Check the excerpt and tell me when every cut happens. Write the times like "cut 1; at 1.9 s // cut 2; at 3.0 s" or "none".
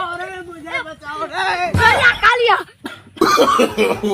cut 1; at 2.8 s

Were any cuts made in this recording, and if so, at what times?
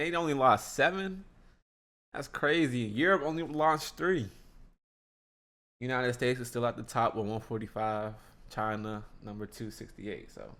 none

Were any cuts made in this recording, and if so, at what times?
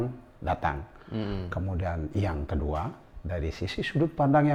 none

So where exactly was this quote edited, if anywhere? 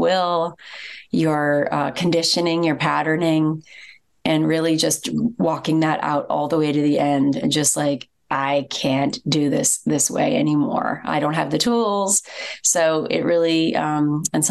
none

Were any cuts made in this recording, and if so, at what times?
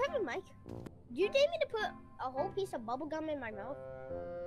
cut 1; at 0.9 s

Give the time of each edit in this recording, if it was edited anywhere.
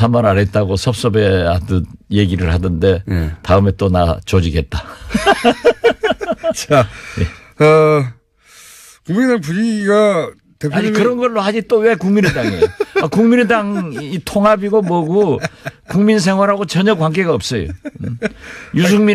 none

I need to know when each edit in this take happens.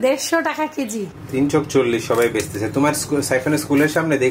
cut 1; at 1.2 s

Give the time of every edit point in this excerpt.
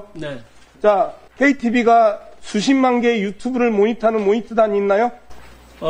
cut 1; at 1.2 s

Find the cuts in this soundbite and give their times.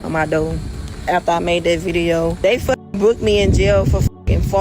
cut 1; at 2.3 s

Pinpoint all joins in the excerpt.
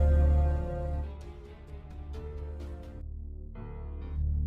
cut 1; at 1.0 s // cut 2; at 2.8 s

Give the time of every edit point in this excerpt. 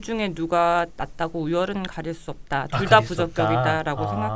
none

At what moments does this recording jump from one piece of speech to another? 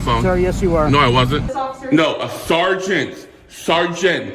cut 1; at 1.5 s

